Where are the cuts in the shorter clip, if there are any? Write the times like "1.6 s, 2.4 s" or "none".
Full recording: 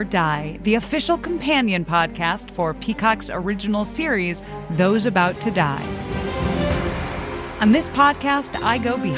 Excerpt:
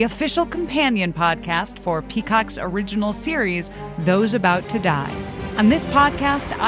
5.4 s